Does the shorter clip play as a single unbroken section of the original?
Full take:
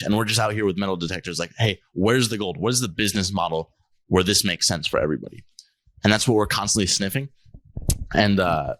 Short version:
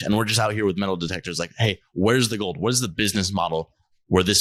yes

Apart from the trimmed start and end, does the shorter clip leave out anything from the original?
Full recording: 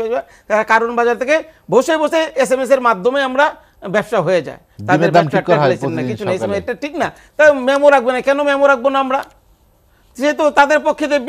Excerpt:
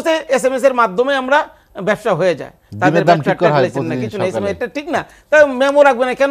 no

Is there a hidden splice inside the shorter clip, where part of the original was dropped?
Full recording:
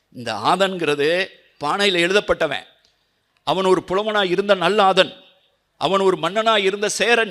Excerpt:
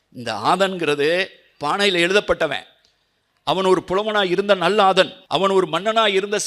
yes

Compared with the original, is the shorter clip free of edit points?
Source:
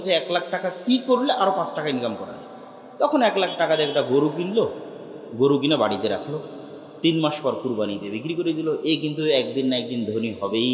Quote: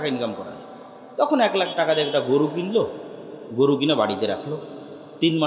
yes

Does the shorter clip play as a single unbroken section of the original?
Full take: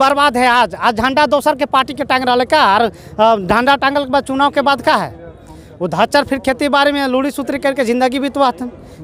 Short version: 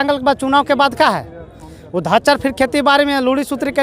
yes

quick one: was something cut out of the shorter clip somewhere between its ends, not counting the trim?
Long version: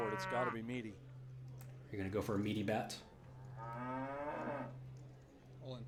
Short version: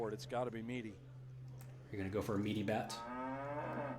yes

